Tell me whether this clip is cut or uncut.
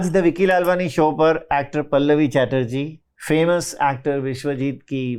uncut